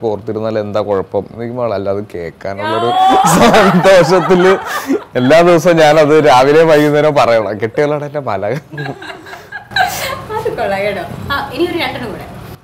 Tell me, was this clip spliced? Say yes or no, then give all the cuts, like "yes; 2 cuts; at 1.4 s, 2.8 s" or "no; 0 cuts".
no; 0 cuts